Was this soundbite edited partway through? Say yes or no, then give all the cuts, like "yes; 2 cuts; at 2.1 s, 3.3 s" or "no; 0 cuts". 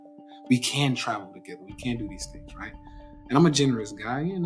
no; 0 cuts